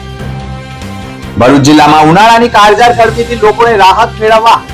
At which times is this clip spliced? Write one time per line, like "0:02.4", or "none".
0:01.3